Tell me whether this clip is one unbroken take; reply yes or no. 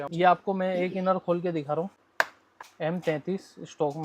no